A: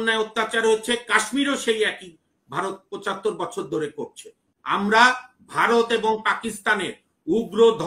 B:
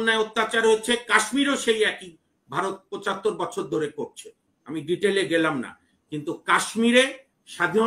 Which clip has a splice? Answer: A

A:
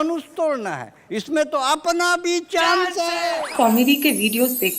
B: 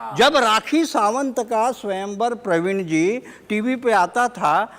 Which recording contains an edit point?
A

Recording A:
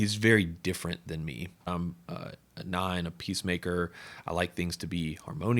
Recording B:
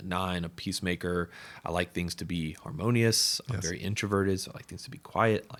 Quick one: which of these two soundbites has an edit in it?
A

